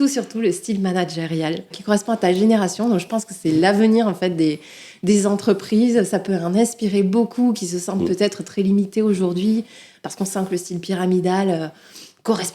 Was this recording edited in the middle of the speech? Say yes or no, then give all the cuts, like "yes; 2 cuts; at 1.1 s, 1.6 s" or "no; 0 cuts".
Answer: yes; 1 cut; at 1.8 s